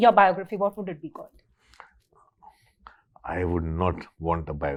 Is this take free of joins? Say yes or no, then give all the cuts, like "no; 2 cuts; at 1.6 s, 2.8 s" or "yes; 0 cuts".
yes; 0 cuts